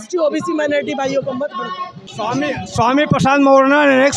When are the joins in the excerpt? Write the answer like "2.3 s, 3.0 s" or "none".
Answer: none